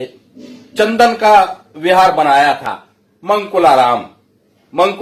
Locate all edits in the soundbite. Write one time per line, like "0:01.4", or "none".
none